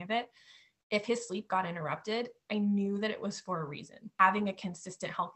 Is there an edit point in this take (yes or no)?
yes